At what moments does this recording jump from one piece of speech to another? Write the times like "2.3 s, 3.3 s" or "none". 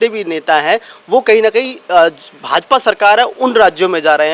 none